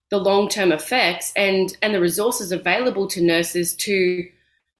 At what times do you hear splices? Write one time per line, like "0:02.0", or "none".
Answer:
none